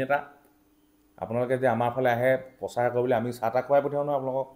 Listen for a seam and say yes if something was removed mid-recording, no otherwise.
no